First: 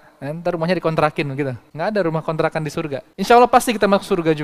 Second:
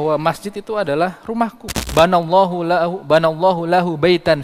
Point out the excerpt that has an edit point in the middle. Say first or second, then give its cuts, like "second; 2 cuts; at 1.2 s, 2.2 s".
second; 1 cut; at 1.8 s